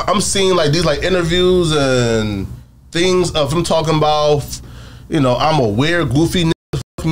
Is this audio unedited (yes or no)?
yes